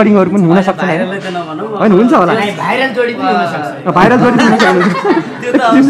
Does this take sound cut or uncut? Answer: uncut